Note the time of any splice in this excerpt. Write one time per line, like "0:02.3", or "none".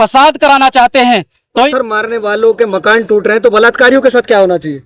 0:01.7